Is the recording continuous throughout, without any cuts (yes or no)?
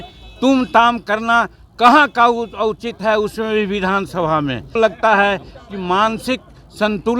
no